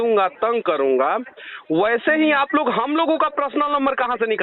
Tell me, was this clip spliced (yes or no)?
no